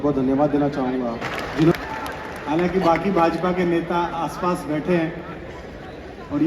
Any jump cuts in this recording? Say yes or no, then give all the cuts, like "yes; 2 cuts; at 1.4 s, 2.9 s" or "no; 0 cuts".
yes; 1 cut; at 1.7 s